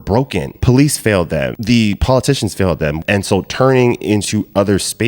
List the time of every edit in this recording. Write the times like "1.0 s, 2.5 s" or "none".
1.5 s, 3.0 s